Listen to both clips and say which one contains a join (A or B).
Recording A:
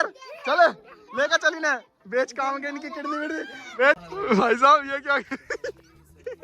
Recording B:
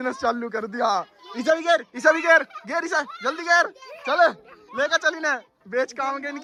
A